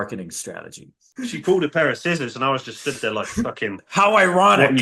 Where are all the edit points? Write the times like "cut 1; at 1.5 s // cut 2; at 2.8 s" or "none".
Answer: cut 1; at 1.0 s